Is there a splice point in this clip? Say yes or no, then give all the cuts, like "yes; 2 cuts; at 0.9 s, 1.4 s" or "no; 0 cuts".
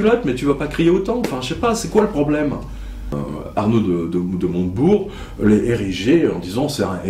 yes; 1 cut; at 3.1 s